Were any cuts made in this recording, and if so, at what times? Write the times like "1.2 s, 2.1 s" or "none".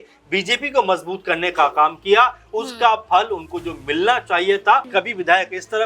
4.9 s